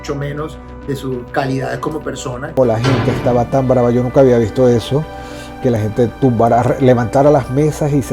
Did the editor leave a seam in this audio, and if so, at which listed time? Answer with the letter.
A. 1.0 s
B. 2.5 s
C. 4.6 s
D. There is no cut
B